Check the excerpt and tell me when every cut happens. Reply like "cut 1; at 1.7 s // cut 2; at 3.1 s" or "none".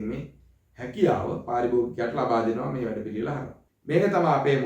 cut 1; at 3.6 s